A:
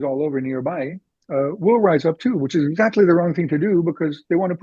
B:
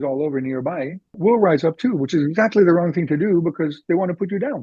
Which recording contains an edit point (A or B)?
B